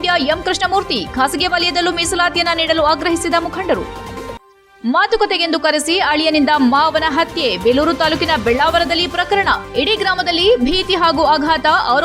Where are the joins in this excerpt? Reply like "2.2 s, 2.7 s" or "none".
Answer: none